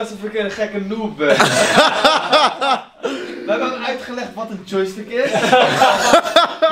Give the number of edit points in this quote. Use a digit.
0